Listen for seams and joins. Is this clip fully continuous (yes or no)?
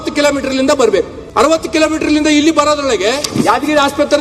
no